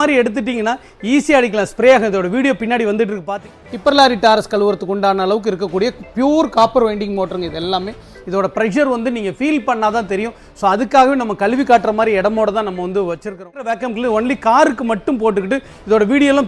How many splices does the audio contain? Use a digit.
2